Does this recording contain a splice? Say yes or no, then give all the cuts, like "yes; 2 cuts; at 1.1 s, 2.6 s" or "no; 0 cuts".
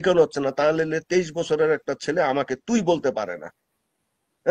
no; 0 cuts